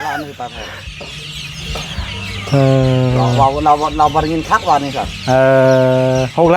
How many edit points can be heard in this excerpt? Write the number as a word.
zero